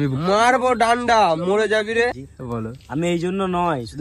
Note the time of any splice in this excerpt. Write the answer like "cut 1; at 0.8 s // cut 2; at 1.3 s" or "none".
cut 1; at 2.3 s

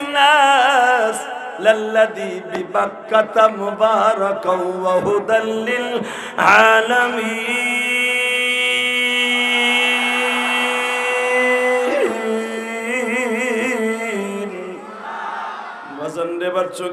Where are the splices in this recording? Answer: cut 1; at 15.9 s

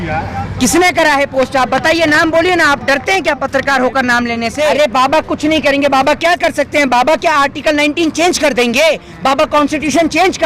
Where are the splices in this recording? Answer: cut 1; at 4.7 s

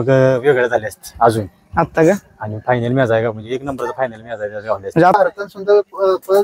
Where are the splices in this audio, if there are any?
cut 1; at 5.1 s

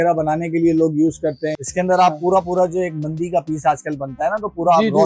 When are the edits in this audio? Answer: cut 1; at 1.5 s

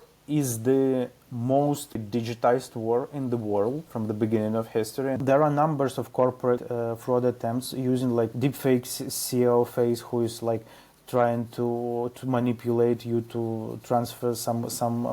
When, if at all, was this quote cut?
cut 1; at 2.0 s // cut 2; at 3.9 s // cut 3; at 5.2 s // cut 4; at 6.6 s // cut 5; at 8.3 s

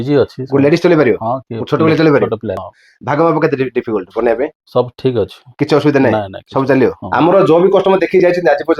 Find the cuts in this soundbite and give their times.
cut 1; at 2.6 s // cut 2; at 7.0 s

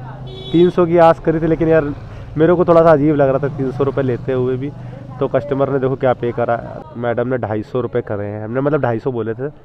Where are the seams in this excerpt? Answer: cut 1; at 6.7 s

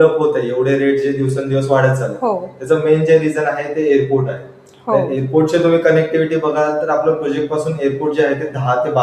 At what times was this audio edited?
none

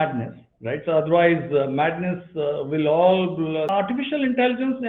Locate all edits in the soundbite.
cut 1; at 3.7 s

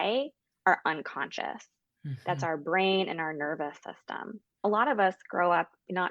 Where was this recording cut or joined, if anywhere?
cut 1; at 4.6 s

